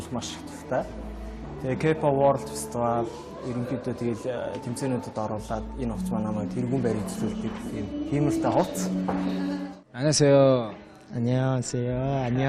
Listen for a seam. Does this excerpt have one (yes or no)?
no